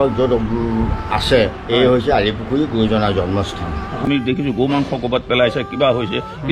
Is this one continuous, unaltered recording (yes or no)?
no